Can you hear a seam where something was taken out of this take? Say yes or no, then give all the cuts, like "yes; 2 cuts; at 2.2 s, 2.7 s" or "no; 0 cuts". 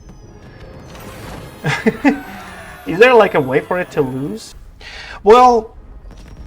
yes; 1 cut; at 4.5 s